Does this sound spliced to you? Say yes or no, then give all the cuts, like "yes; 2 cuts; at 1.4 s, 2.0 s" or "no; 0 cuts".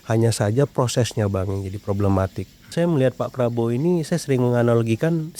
yes; 1 cut; at 2.7 s